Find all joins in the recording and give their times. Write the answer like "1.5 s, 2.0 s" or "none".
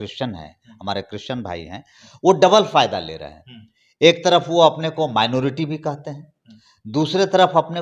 none